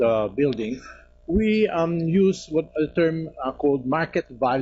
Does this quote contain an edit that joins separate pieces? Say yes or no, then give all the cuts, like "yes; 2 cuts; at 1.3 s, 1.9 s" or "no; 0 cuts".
yes; 1 cut; at 2.8 s